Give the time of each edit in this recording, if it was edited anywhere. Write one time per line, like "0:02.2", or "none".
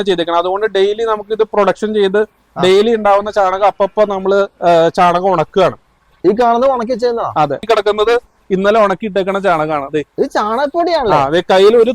0:07.6